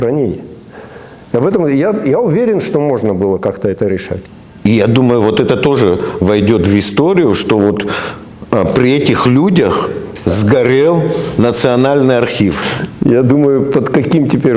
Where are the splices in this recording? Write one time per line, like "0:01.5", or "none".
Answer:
0:04.2
0:12.8